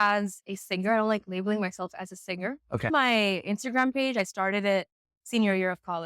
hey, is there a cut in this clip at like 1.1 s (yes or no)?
no